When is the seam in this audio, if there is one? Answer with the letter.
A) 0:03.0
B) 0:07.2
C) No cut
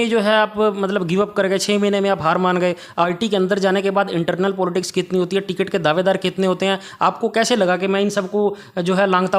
A